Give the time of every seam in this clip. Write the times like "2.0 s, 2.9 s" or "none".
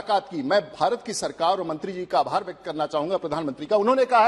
none